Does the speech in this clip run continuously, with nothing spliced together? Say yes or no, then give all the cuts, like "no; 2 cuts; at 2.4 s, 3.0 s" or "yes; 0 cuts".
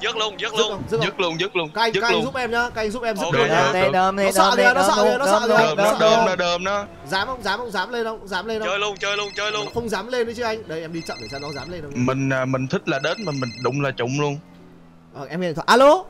yes; 0 cuts